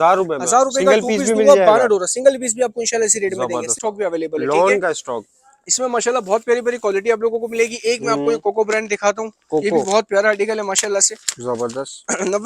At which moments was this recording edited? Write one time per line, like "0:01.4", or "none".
0:03.8